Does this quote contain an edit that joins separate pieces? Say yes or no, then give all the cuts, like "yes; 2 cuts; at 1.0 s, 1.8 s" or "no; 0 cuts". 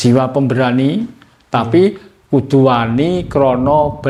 no; 0 cuts